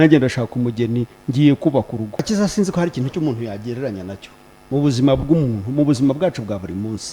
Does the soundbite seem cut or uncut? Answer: cut